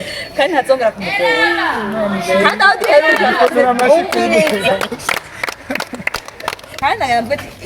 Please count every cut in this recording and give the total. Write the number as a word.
one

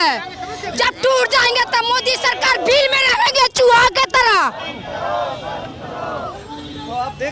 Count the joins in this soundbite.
zero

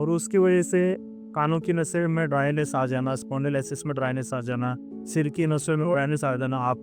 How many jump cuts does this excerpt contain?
zero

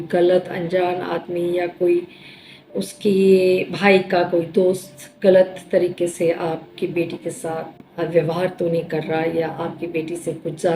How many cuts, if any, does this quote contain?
one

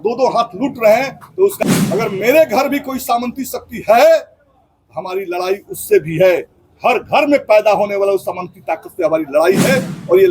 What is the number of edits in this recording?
one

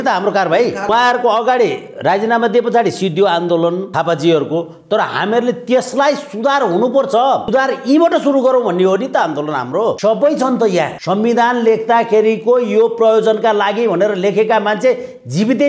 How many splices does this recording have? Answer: five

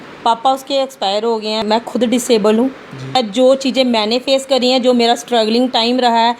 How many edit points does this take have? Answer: two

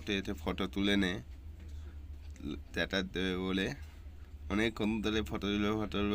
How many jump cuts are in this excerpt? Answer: zero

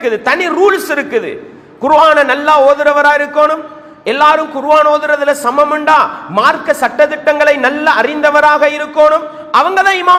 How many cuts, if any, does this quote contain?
zero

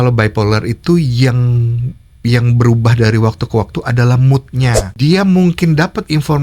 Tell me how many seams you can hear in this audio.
one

